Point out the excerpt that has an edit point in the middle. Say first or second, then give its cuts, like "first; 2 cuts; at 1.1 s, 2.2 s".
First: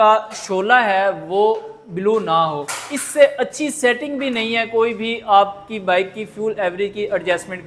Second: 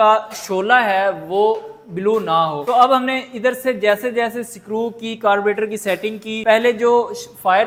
first; 1 cut; at 2.6 s